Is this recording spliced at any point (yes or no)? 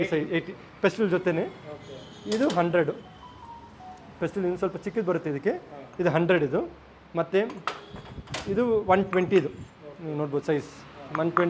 no